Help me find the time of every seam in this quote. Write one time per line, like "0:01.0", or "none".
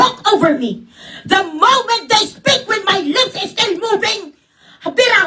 none